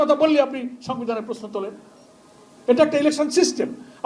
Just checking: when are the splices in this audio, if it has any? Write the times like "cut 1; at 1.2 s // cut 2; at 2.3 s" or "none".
none